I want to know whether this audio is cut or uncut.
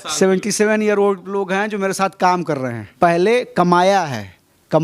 cut